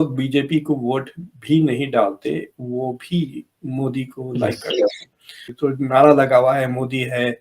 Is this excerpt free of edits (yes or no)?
no